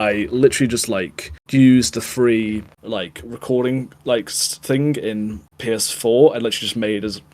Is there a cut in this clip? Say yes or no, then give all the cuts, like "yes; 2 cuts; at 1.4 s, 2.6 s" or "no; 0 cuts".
no; 0 cuts